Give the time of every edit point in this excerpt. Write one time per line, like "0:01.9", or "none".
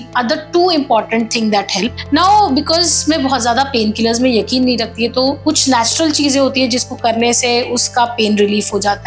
0:02.0

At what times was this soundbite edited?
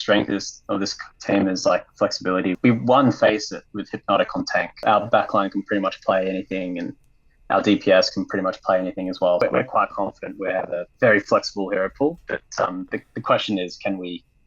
0:02.6
0:04.7
0:09.4

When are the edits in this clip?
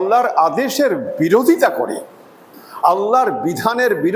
0:02.9

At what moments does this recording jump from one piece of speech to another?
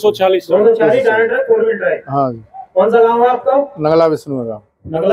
none

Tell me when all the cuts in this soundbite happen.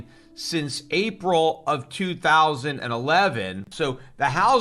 0:03.7

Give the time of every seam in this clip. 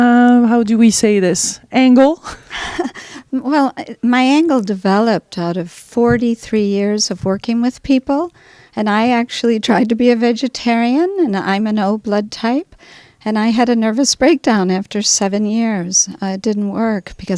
0:06.9

